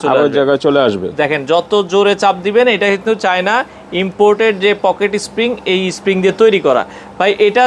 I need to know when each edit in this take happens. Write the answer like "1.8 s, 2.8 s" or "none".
none